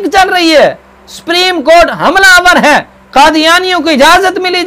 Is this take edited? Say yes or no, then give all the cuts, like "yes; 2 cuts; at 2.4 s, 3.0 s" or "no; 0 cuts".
no; 0 cuts